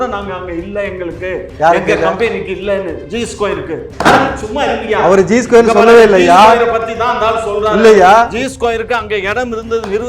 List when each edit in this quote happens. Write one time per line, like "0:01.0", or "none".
0:03.9